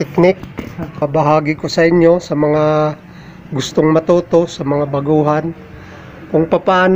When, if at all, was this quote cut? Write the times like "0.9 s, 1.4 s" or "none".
1.0 s